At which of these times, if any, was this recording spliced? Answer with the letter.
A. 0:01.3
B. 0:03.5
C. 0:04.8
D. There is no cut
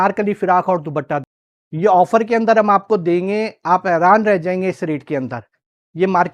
A